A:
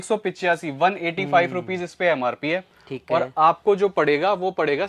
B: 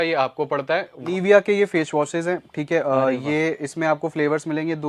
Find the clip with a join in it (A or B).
B